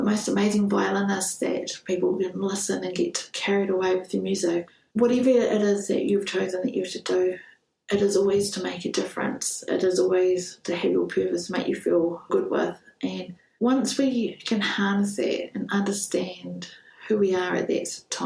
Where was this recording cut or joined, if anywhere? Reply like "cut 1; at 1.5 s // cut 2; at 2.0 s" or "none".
cut 1; at 4.7 s